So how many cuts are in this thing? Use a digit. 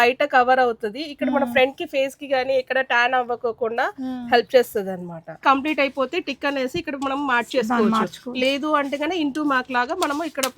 1